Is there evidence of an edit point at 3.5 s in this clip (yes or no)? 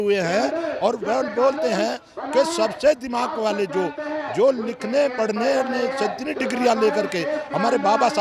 no